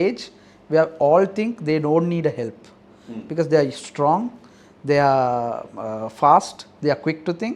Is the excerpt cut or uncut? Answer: uncut